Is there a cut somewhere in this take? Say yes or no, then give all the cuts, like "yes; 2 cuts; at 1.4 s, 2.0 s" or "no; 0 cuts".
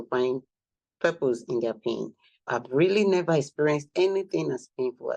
yes; 1 cut; at 2.3 s